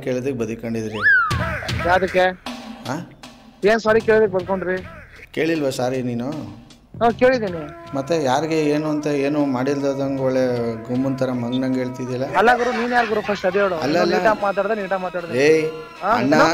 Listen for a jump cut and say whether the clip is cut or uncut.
uncut